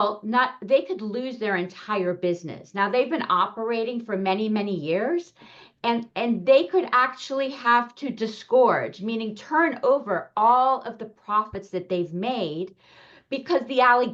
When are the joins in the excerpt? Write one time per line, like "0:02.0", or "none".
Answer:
none